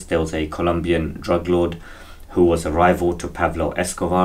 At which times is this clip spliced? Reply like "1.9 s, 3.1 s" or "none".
none